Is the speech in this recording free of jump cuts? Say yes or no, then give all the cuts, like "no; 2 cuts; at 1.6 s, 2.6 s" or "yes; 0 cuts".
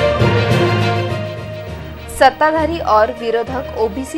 no; 1 cut; at 1.0 s